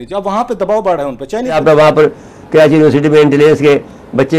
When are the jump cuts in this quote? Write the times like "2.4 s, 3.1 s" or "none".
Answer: 1.6 s